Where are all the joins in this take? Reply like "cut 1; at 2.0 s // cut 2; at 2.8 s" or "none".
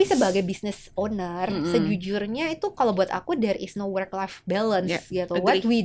none